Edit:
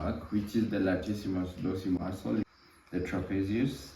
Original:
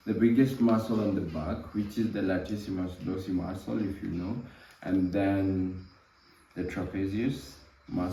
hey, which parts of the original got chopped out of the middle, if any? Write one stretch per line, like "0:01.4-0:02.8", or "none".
0:03.9-0:06.1